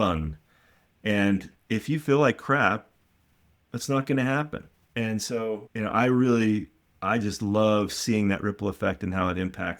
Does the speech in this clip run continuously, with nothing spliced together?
no; 2 cuts; at 4.8 s, 5.7 s

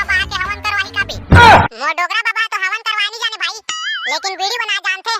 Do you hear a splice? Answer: yes; 2 cuts; at 1.2 s, 1.8 s

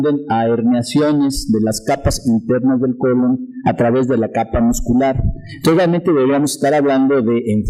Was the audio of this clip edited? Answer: no; 0 cuts

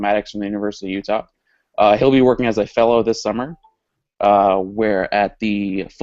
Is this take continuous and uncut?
no; 1 cut; at 4.9 s

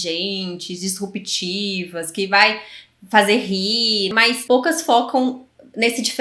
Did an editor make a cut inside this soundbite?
yes; 1 cut; at 4.1 s

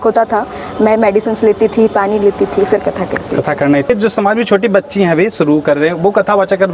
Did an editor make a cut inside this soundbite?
yes; 1 cut; at 3.9 s

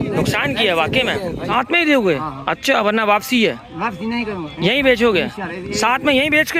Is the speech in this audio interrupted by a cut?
yes; 1 cut; at 1.5 s

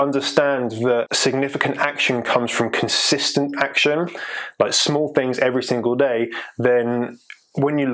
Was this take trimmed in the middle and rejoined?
yes; 1 cut; at 1.1 s

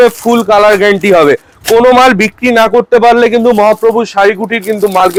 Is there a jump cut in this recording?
no; 0 cuts

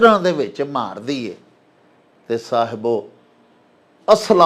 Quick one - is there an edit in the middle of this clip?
no; 0 cuts

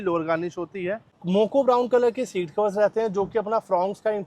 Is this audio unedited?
no; 1 cut; at 1.1 s

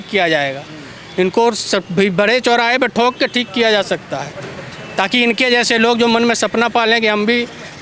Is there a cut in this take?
no; 0 cuts

